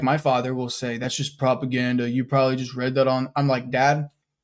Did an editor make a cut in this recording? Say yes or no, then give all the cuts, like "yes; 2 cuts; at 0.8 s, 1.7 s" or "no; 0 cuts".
no; 0 cuts